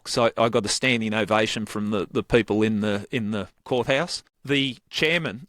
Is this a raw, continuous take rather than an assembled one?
no; 1 cut; at 4.3 s

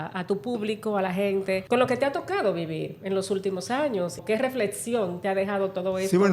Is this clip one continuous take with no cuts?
no; 2 cuts; at 1.6 s, 4.2 s

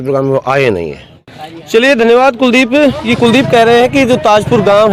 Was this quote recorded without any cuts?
yes; 0 cuts

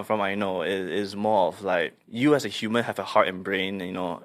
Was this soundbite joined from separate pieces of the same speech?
yes; 1 cut; at 2.0 s

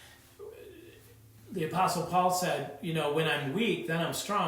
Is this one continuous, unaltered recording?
yes; 0 cuts

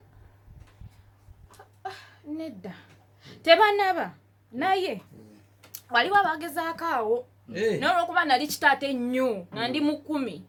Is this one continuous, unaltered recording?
yes; 0 cuts

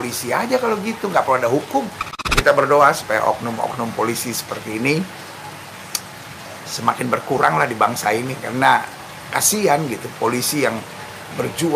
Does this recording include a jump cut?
yes; 1 cut; at 2.3 s

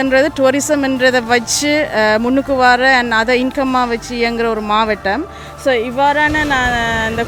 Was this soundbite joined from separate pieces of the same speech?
no; 0 cuts

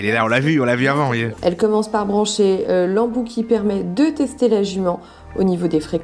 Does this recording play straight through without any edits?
no; 1 cut; at 1.3 s

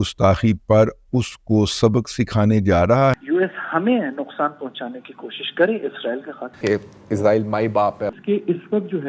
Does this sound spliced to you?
yes; 2 cuts; at 3.2 s, 6.5 s

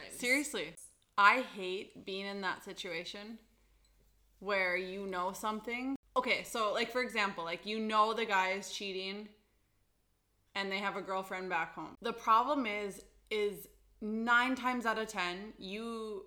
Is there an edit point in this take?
yes; 3 cuts; at 1.0 s, 6.0 s, 11.9 s

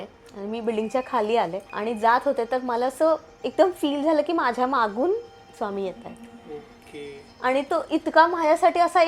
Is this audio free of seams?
no; 1 cut; at 1.7 s

